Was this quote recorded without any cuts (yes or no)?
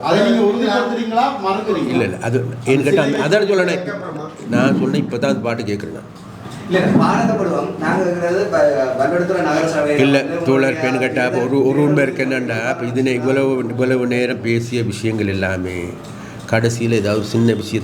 yes